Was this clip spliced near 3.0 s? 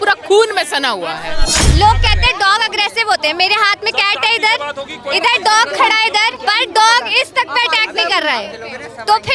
no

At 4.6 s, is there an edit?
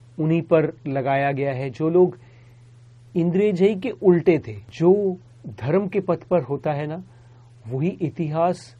yes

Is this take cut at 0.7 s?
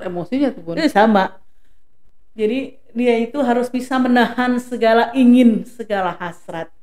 no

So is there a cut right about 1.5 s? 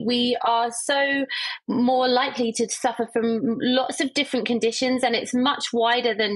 no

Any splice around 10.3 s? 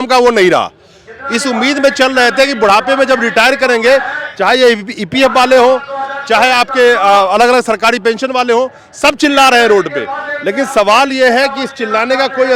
no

